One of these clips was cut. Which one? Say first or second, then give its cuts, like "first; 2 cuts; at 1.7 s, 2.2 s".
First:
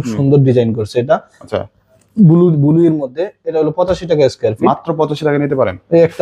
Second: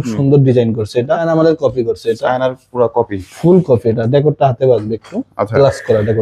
second; 1 cut; at 1.2 s